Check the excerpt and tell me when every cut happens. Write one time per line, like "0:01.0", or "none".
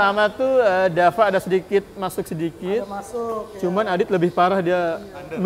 none